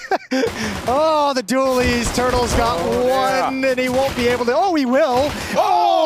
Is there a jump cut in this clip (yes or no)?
no